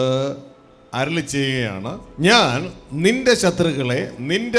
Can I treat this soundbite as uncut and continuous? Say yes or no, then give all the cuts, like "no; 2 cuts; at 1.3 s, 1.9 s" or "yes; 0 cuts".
no; 1 cut; at 2.0 s